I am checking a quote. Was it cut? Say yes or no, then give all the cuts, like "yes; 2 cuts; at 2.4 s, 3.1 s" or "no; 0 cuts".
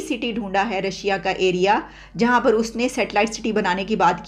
no; 0 cuts